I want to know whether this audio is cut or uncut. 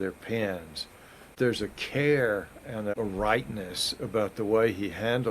cut